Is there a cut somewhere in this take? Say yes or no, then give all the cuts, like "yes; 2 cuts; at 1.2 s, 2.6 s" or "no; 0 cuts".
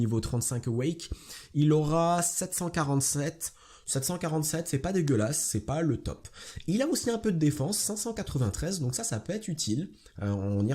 no; 0 cuts